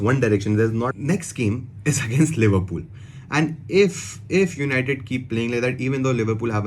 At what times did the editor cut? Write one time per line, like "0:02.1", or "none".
0:00.9